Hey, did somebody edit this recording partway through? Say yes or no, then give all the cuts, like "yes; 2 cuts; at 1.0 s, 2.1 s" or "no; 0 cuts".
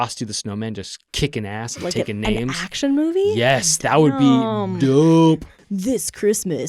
no; 0 cuts